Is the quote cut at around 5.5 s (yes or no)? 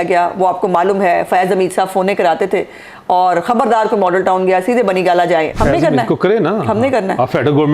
yes